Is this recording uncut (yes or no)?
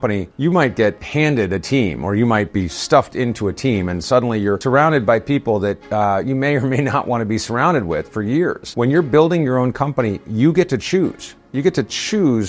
no